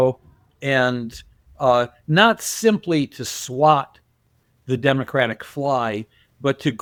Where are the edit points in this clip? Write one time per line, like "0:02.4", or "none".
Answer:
none

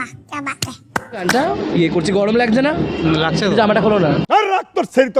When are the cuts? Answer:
0:01.2
0:04.2

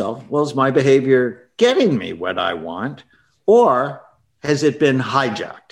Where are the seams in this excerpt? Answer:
none

